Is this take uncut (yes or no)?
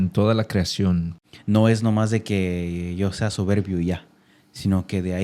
no